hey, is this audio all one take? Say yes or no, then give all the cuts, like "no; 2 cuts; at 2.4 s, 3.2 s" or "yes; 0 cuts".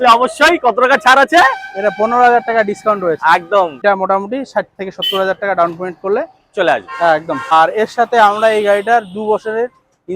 no; 2 cuts; at 3.8 s, 7.5 s